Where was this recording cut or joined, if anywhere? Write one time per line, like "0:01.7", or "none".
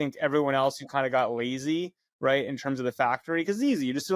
none